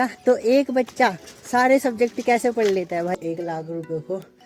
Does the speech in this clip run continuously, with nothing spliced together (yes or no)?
no